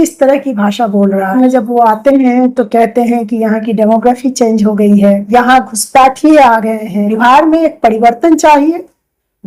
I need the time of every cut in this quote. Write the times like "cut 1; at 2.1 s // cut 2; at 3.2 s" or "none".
cut 1; at 1.3 s // cut 2; at 5.2 s // cut 3; at 7.1 s